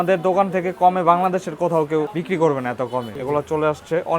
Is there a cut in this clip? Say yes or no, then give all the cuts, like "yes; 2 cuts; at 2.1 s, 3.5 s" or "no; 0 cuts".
yes; 2 cuts; at 2.2 s, 3.2 s